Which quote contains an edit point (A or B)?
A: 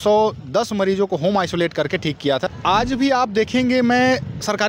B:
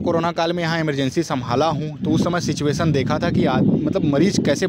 A